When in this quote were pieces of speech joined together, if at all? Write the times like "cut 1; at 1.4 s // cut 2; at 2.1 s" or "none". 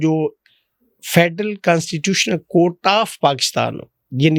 none